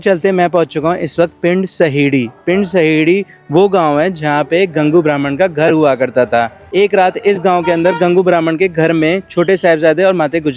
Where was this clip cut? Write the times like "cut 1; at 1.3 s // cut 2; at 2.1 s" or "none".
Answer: cut 1; at 6.6 s